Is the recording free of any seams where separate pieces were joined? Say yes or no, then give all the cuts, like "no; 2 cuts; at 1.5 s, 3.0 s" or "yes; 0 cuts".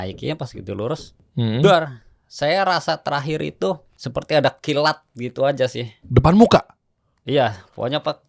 no; 2 cuts; at 1.2 s, 3.9 s